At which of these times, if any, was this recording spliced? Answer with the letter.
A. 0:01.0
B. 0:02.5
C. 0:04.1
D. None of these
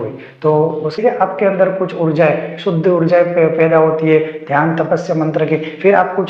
A